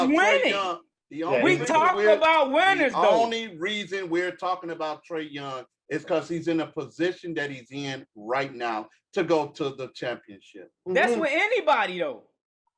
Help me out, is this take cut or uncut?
uncut